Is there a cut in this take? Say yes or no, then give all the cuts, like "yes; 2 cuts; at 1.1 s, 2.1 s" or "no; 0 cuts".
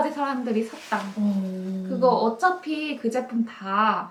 no; 0 cuts